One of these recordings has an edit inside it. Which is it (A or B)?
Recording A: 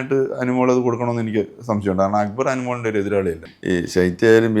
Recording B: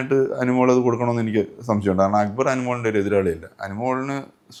A